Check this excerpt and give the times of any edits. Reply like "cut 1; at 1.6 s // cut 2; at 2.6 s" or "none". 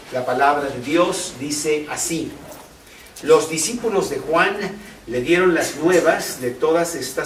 none